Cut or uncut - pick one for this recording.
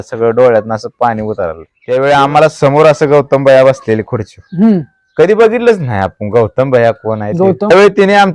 cut